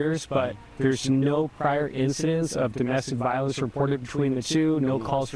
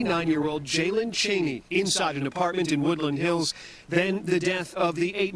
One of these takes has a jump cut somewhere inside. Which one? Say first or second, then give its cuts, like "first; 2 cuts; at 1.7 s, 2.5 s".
second; 1 cut; at 2.5 s